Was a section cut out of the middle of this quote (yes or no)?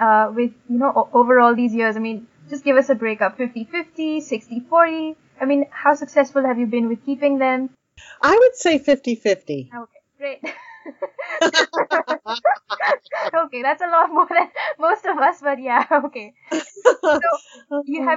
no